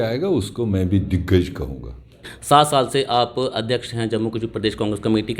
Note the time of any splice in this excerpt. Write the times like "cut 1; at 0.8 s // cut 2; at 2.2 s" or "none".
cut 1; at 2.2 s